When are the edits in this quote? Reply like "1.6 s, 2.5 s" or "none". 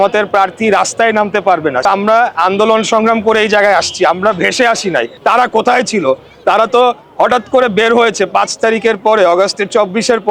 1.9 s, 5.1 s

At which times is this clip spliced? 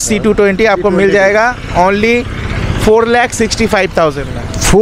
none

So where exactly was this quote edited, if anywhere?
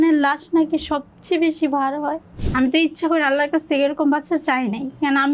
2.3 s

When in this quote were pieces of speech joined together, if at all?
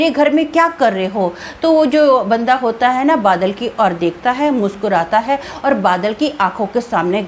none

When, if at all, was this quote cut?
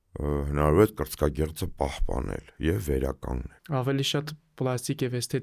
3.5 s

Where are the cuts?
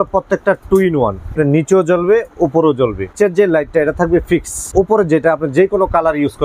1.3 s, 3.1 s, 4.7 s

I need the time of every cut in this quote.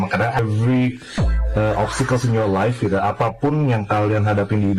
none

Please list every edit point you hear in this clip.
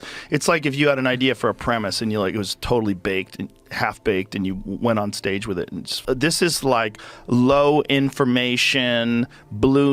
5.8 s

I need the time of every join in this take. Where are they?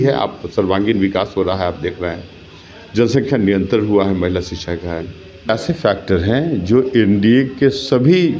5.5 s

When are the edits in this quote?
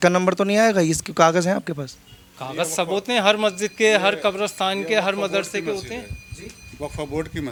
none

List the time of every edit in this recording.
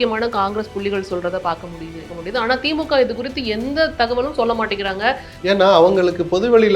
2.1 s, 5.3 s

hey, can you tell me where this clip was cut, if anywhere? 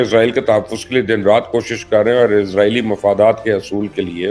none

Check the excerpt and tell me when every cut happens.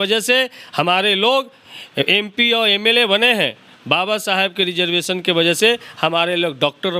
none

